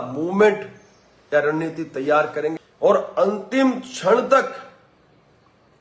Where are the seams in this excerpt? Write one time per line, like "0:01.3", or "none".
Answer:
0:02.5